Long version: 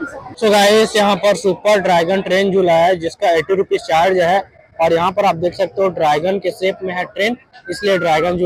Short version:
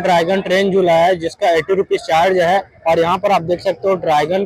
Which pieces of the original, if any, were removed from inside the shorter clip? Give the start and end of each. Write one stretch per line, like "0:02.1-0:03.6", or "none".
0:04.5-0:04.7

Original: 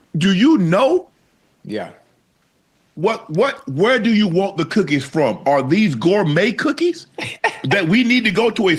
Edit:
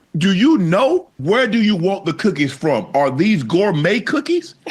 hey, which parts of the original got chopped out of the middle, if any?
0:01.1-0:03.7

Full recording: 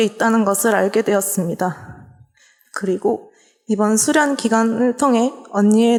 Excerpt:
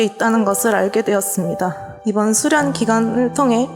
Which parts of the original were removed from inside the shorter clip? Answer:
0:01.9-0:03.5

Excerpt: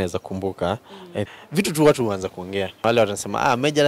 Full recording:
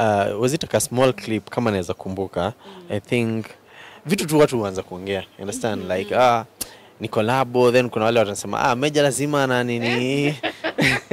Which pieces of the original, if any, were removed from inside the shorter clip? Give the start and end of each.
0:03.0-0:03.8
0:05.4-0:08.0

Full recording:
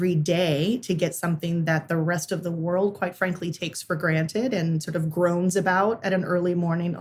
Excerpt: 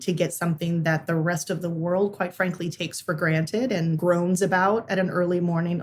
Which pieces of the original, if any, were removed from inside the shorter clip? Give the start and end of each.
0:04.8-0:05.1

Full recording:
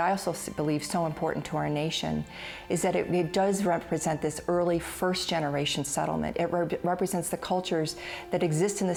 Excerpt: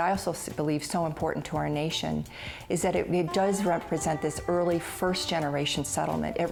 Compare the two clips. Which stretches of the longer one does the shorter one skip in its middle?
none

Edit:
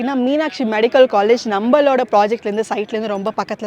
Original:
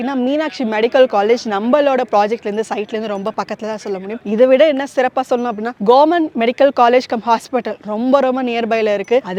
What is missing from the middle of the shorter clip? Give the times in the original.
none

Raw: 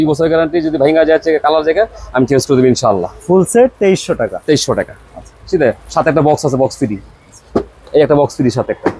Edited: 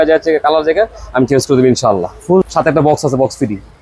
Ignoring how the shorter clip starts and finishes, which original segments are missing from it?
0:03.5-0:05.9

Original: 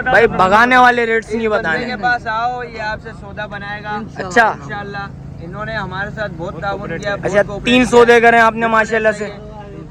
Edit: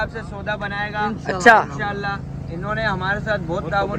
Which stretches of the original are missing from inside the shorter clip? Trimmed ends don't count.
none

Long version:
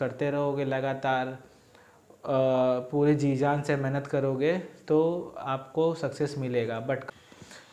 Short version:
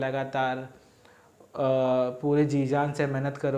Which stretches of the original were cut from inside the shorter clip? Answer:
none

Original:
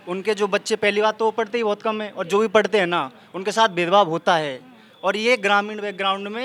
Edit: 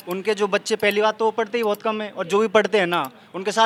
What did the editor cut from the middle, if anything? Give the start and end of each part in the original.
none

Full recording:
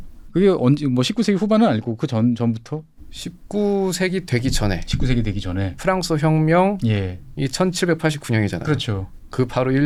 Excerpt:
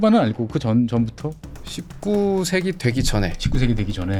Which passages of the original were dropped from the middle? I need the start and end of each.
none

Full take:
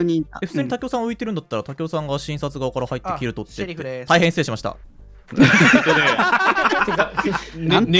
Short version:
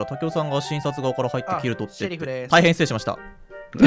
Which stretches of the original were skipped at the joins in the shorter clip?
none

